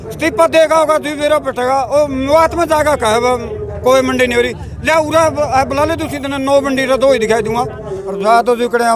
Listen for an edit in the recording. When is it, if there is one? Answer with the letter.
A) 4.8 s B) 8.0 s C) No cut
B